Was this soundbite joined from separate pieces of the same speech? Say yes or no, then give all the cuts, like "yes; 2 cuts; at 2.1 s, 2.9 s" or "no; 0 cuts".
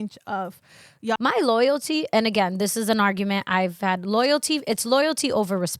yes; 1 cut; at 1.2 s